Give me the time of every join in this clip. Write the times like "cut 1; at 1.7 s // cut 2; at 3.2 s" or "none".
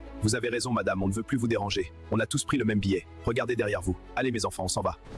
cut 1; at 1.2 s // cut 2; at 3.1 s